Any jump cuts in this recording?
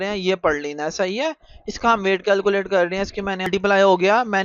yes; 1 cut; at 3.5 s

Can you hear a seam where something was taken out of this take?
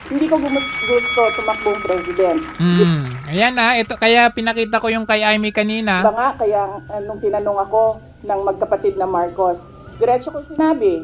yes; 1 cut; at 9.9 s

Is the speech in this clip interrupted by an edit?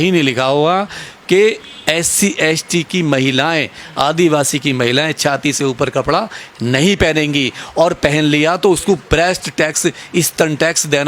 no; 0 cuts

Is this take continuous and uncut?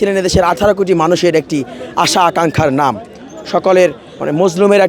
yes; 0 cuts

